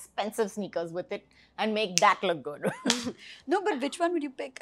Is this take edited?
no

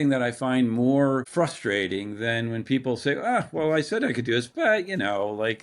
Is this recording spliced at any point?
yes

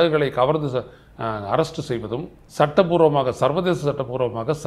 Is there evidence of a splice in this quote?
yes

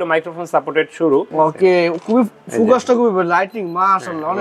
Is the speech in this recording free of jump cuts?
no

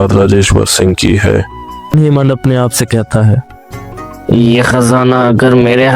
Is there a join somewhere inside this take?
yes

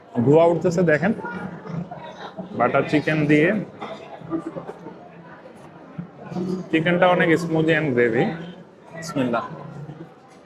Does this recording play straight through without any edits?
yes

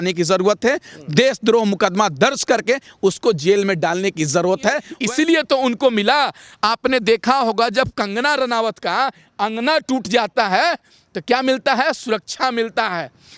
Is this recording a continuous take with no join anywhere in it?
no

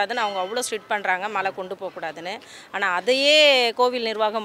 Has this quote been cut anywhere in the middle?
no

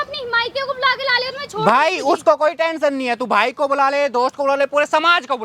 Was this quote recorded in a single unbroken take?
yes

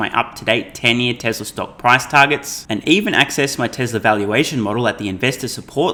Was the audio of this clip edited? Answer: no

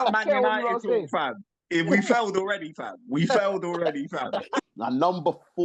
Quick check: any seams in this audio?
yes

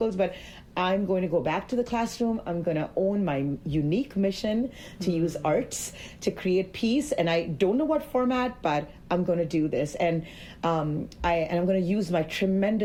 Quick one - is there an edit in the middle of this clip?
no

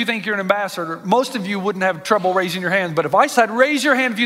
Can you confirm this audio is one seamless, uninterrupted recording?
no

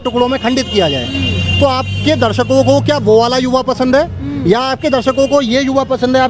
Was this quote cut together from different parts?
no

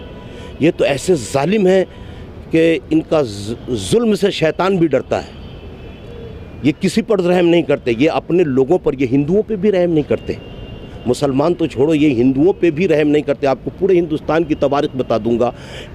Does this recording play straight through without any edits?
yes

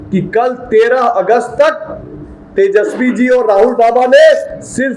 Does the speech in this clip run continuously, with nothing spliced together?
yes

